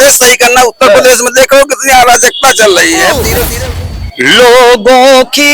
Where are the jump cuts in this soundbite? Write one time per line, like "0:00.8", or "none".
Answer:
0:03.4